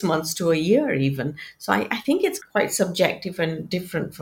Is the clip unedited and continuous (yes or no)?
yes